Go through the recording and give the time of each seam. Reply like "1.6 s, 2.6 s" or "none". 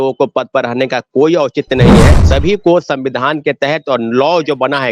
2.2 s